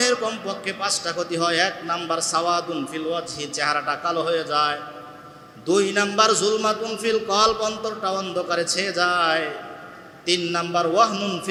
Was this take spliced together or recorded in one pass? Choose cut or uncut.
uncut